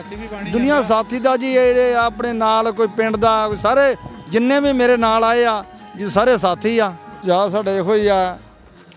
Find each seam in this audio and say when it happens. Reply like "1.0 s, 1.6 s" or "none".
7.1 s